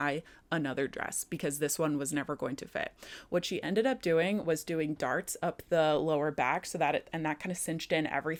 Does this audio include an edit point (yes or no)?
no